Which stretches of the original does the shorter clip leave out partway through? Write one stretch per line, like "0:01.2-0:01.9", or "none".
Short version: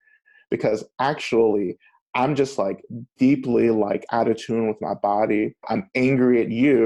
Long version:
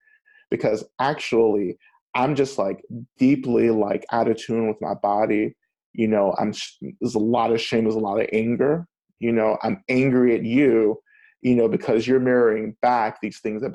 0:05.7-0:09.6